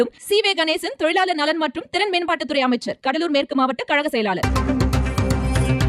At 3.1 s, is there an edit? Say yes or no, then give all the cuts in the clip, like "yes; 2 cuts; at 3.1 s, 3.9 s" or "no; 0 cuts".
no; 1 cut; at 4.4 s